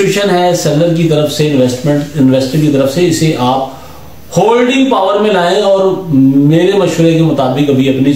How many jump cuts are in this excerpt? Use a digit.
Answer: 0